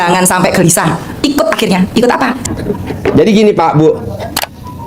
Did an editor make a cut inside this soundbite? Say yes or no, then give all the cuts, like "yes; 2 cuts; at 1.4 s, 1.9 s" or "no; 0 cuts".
yes; 1 cut; at 2.5 s